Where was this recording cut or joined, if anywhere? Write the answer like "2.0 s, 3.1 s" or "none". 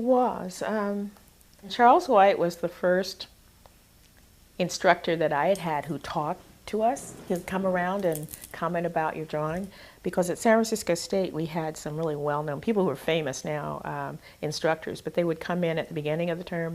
3.0 s